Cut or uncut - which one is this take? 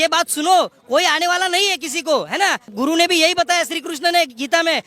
cut